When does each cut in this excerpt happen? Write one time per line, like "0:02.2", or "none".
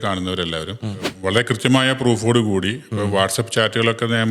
0:01.1